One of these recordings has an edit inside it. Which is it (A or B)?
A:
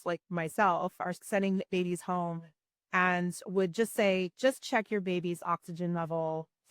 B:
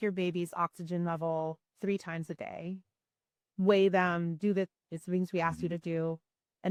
A